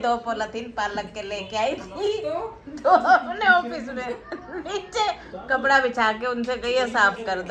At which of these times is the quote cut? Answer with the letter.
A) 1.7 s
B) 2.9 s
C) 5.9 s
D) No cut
D